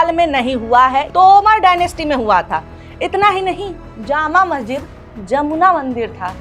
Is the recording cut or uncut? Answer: cut